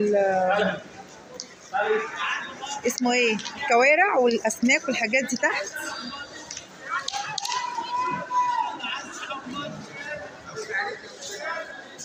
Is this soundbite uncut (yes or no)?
yes